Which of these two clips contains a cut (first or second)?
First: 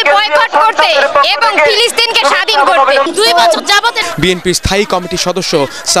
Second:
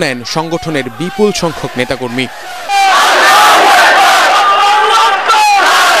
first